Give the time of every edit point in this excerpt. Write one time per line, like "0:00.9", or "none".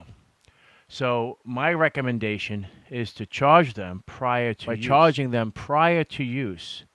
0:04.7

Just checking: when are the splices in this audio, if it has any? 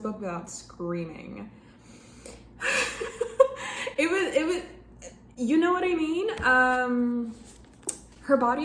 none

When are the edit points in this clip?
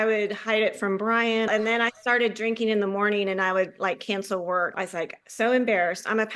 0:01.5
0:04.7

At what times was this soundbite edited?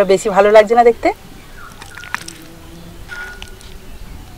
none

